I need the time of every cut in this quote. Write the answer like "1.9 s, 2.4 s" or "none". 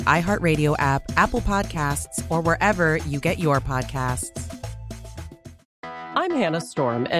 5.7 s

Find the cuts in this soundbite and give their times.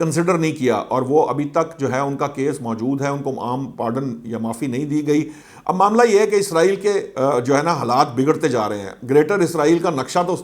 5.4 s

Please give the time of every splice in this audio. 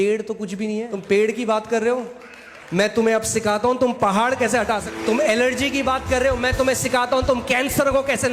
0.9 s, 4.9 s

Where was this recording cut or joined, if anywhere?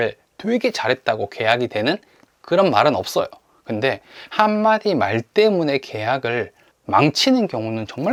none

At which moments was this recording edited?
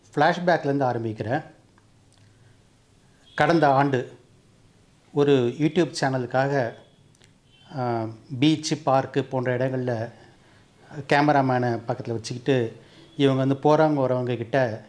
none

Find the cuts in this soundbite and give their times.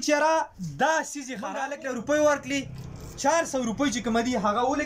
1.5 s

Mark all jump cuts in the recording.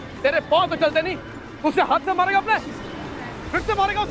none

